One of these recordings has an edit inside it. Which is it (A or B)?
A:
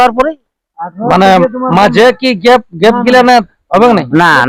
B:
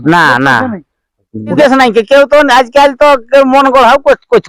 B